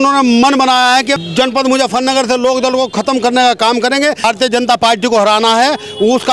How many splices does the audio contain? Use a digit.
2